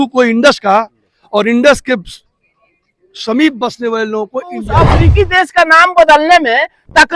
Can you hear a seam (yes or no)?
yes